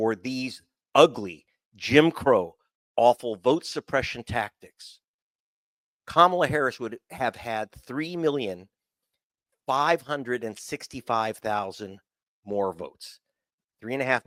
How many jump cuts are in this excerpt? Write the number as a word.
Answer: zero